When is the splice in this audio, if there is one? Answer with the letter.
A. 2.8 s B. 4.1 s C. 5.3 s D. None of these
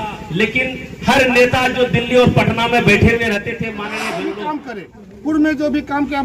B